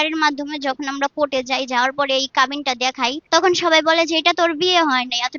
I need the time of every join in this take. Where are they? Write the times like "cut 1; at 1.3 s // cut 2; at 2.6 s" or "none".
cut 1; at 3.2 s